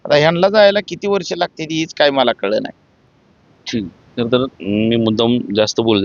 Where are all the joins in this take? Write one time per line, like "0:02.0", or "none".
none